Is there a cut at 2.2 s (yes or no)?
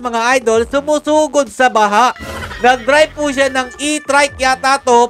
yes